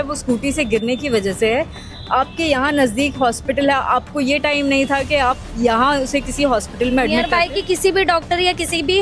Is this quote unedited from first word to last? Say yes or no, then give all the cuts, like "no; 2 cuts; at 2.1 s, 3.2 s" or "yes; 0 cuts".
yes; 0 cuts